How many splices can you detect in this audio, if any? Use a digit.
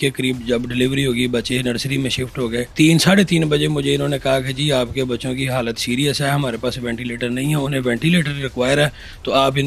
1